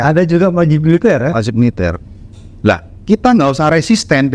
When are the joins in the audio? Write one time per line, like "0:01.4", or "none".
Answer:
none